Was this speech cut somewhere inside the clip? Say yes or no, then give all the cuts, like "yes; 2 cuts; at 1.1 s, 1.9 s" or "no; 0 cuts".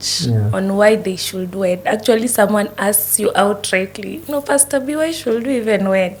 no; 0 cuts